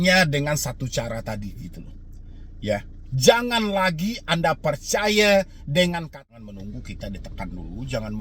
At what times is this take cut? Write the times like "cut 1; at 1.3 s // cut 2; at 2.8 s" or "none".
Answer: cut 1; at 6.3 s